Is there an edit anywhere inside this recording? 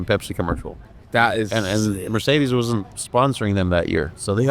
yes; 1 cut; at 2.9 s

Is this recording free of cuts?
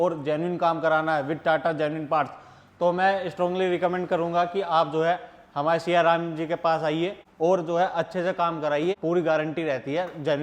no; 2 cuts; at 7.2 s, 9.0 s

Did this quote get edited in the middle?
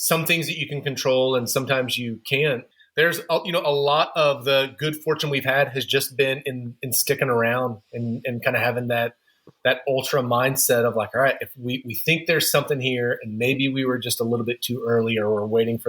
yes; 1 cut; at 2.7 s

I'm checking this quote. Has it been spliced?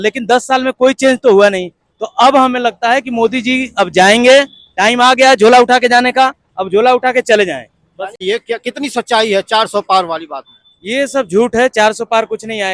yes; 1 cut; at 8.2 s

